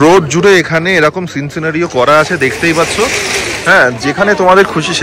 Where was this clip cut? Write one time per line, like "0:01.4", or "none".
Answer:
none